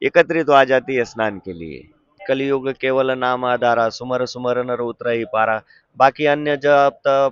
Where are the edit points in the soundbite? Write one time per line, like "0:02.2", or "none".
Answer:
0:02.2